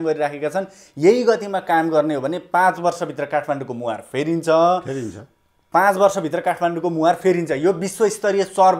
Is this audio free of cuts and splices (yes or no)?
yes